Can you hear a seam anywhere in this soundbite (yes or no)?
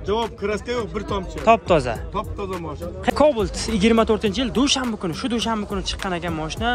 yes